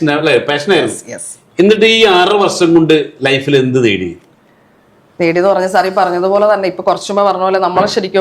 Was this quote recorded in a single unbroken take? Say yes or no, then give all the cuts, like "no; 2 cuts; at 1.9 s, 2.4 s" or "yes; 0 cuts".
yes; 0 cuts